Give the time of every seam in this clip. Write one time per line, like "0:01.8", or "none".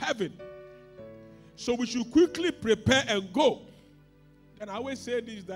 none